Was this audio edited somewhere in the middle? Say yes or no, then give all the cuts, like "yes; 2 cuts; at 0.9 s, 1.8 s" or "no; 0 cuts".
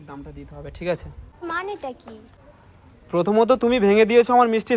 yes; 1 cut; at 1.2 s